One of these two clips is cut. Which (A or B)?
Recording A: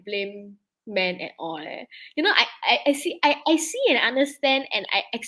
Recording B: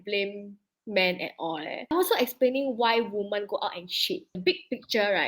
B